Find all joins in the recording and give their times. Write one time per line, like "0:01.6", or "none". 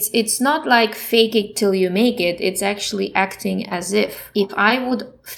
0:01.0
0:04.2